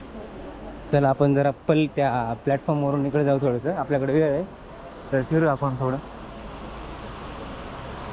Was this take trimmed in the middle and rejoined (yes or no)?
no